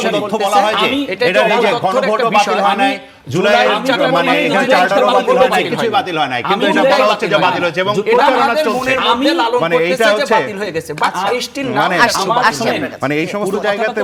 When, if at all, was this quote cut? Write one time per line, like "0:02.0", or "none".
none